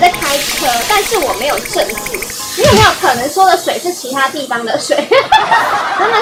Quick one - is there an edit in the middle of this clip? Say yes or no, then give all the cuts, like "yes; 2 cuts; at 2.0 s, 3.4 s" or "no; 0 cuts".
no; 0 cuts